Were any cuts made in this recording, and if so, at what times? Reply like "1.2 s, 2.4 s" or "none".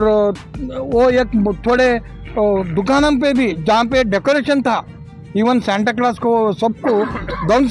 none